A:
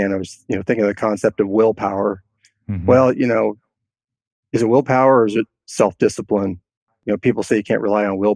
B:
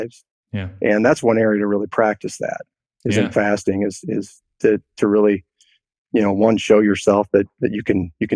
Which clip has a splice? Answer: A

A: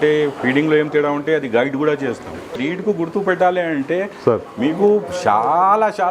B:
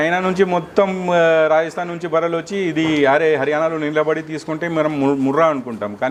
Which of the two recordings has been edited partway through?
A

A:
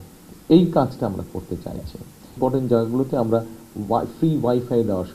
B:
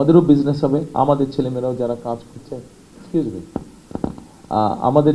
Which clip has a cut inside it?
A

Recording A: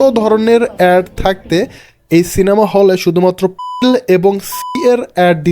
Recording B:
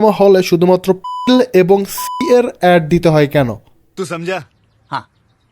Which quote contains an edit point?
B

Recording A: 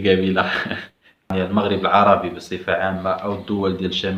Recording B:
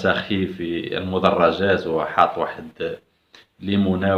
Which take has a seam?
A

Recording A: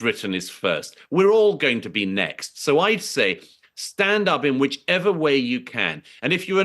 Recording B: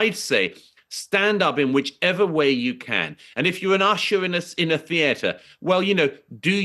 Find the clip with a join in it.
A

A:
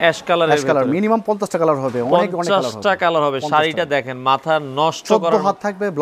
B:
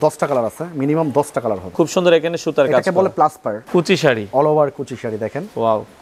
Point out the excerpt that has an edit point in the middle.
B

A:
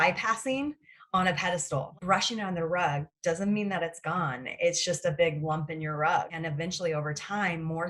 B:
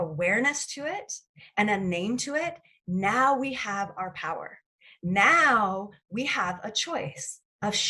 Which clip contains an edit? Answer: A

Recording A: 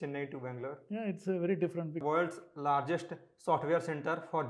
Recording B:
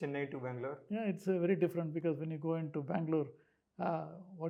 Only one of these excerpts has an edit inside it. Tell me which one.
A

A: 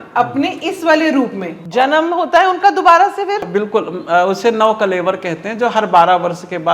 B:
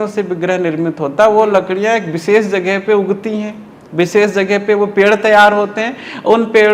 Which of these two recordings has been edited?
A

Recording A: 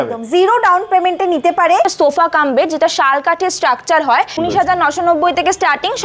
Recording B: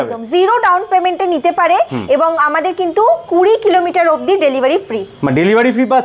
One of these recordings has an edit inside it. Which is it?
A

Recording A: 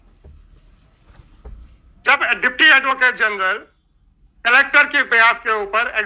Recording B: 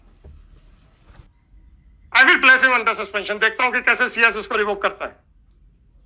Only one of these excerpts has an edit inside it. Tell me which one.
B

